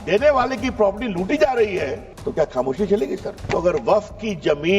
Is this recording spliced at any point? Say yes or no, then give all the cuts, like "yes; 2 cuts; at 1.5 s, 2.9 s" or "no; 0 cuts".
yes; 2 cuts; at 2.1 s, 3.3 s